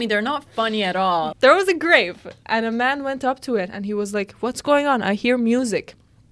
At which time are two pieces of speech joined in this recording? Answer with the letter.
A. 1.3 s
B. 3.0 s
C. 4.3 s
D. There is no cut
A